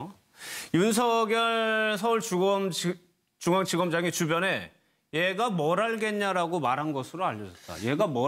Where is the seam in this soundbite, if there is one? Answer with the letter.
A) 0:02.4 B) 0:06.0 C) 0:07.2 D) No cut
D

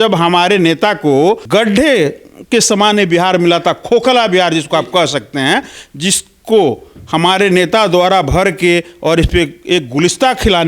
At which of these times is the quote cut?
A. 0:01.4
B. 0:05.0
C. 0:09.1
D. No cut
A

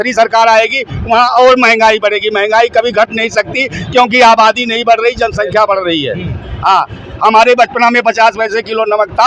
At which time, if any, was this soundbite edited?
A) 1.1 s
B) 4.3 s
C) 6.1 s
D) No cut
D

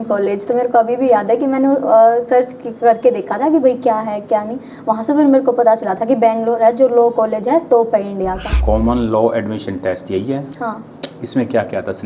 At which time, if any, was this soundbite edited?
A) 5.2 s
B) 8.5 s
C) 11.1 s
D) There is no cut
B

